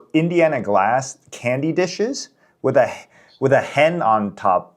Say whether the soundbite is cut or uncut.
uncut